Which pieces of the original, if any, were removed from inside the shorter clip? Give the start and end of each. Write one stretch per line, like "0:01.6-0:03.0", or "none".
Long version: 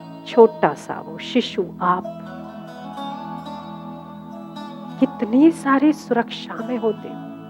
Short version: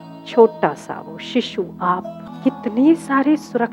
0:02.2-0:04.8